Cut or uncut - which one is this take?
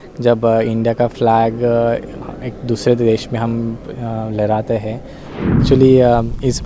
cut